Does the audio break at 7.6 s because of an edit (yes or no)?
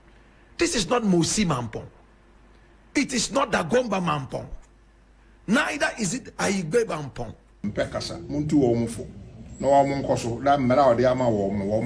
yes